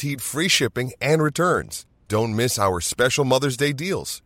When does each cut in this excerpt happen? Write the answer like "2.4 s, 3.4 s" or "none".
none